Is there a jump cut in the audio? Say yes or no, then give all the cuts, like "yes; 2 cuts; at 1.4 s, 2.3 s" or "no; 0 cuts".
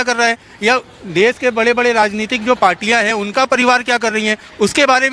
no; 0 cuts